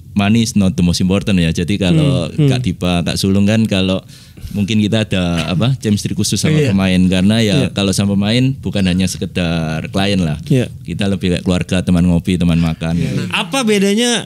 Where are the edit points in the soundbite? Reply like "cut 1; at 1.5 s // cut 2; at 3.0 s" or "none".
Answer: cut 1; at 13.1 s